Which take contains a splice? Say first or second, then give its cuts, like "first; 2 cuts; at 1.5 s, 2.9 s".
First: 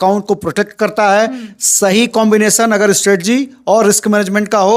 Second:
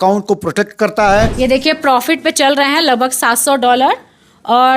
second; 1 cut; at 1.3 s